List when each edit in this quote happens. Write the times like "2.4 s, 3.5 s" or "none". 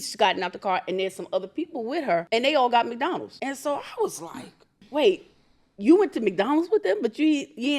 2.3 s, 3.3 s, 4.7 s